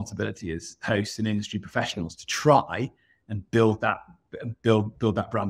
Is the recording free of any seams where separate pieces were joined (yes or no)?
yes